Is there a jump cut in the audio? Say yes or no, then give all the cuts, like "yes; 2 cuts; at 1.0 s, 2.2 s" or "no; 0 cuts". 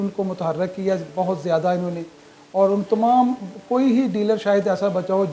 no; 0 cuts